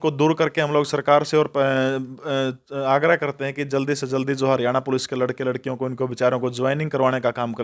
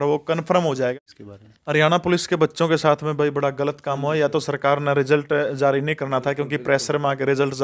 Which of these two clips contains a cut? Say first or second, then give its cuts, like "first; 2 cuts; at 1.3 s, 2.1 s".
second; 1 cut; at 1.0 s